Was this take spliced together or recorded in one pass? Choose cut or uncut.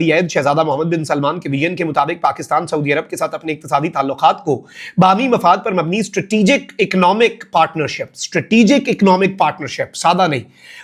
uncut